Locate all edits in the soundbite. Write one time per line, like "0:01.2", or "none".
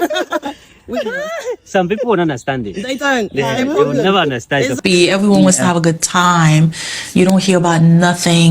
0:04.8